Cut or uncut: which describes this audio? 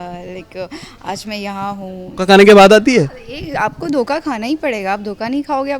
cut